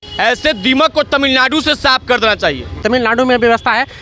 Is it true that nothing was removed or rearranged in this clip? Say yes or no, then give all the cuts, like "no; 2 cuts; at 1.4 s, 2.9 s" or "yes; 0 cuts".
no; 1 cut; at 2.8 s